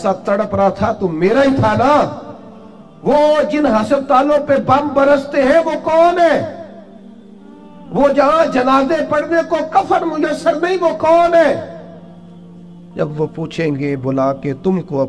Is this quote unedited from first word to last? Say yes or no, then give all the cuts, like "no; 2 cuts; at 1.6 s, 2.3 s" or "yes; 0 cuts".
yes; 0 cuts